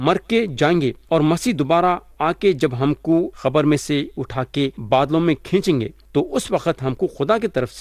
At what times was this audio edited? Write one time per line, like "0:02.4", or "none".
0:01.0
0:03.3
0:04.8
0:06.0

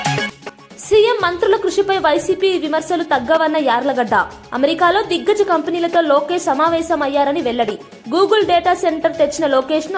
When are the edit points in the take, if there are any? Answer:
none

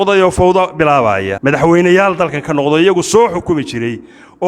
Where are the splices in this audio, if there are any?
0:01.3

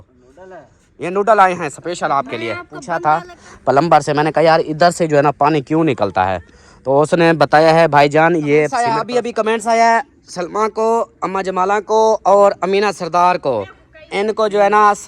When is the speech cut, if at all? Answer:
0:02.8
0:08.9

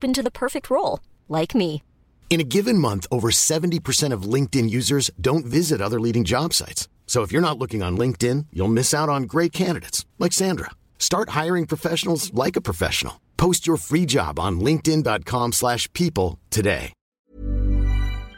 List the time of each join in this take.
0:17.1

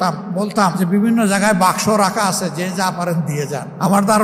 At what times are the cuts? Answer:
none

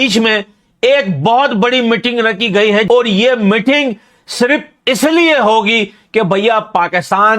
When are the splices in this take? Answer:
0:02.8

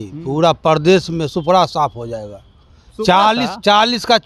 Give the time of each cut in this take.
none

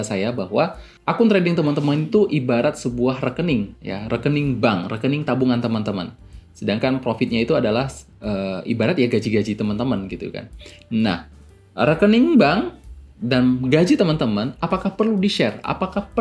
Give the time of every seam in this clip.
0:01.0
0:03.8

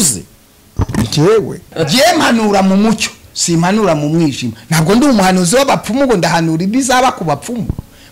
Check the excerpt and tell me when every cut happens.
0:01.7

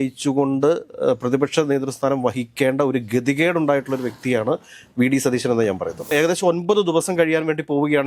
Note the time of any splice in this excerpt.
0:06.0

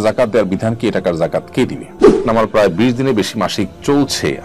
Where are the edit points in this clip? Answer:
0:02.0

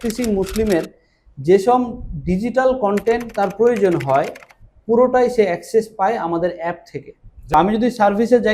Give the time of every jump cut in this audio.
0:07.5

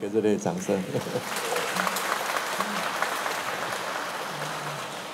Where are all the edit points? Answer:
none

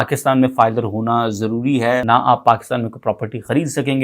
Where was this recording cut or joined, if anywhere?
0:02.0

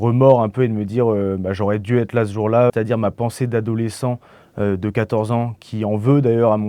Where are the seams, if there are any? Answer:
0:02.7

